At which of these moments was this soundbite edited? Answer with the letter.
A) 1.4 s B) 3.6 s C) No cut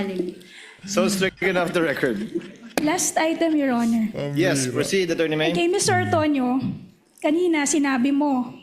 A